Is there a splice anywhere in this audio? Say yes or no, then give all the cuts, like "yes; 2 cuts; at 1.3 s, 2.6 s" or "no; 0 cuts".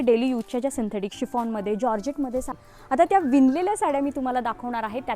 yes; 1 cut; at 2.6 s